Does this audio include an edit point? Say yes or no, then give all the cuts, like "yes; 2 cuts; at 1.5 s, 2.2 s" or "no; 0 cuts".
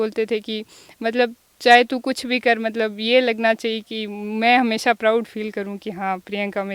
no; 0 cuts